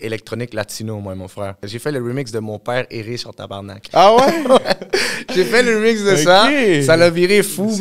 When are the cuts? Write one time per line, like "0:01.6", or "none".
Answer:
0:01.7